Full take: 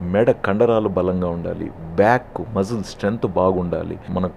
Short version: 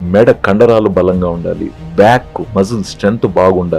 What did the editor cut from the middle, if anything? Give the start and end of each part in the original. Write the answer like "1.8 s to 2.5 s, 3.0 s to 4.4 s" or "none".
none